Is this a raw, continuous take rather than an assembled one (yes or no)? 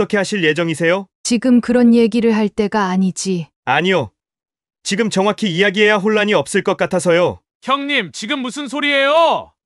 no